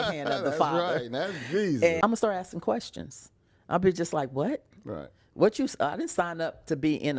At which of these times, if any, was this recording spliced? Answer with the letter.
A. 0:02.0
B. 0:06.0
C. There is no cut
A